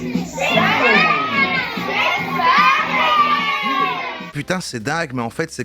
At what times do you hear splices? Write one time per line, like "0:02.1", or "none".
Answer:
0:04.3